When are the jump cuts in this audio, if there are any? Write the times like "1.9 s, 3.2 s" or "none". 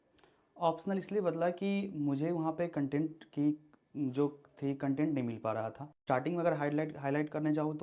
5.9 s